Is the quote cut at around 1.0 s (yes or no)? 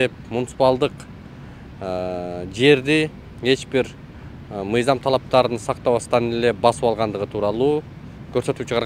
no